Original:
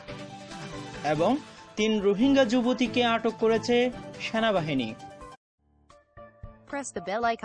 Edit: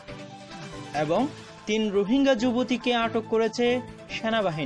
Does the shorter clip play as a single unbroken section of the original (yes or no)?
no